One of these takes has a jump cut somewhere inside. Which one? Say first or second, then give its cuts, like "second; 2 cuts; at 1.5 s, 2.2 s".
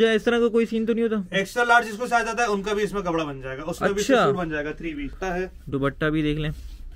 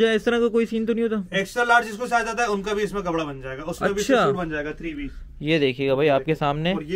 first; 1 cut; at 5.1 s